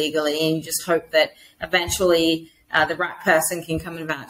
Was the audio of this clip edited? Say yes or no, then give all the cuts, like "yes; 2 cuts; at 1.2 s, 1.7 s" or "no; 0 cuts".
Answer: no; 0 cuts